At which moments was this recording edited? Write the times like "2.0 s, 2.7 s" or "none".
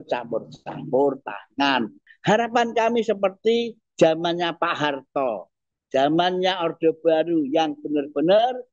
2.0 s